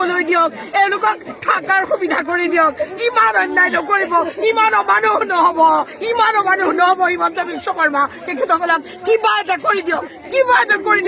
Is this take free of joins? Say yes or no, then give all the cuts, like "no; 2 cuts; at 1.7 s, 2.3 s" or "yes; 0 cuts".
yes; 0 cuts